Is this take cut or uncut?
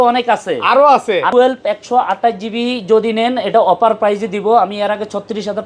cut